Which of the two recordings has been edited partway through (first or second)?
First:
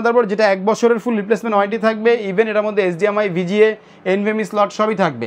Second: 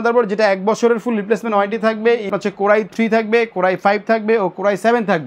second